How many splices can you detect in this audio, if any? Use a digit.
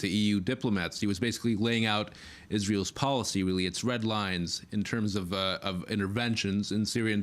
1